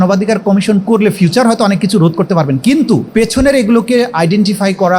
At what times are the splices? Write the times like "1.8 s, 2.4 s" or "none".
3.1 s